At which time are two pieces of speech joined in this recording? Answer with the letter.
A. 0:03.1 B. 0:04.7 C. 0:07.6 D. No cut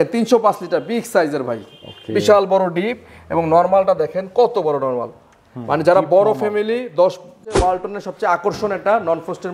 C